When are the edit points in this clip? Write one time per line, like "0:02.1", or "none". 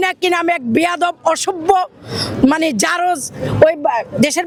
none